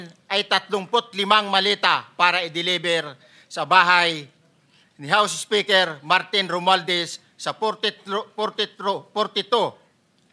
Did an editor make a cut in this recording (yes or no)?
no